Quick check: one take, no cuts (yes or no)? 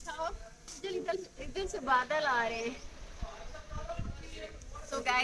yes